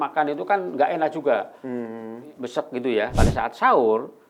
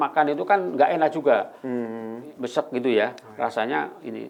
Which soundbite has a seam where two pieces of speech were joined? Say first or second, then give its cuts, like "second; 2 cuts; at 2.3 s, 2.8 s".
first; 1 cut; at 3.1 s